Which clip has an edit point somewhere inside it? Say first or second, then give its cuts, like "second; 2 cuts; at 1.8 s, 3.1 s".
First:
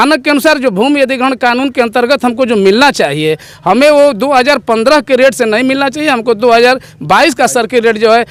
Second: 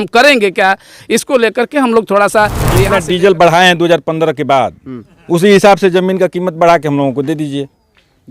second; 1 cut; at 2.7 s